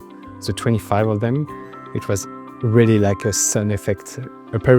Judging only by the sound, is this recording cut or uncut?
uncut